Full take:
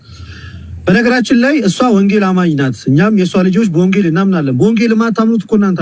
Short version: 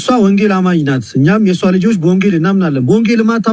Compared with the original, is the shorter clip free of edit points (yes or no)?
yes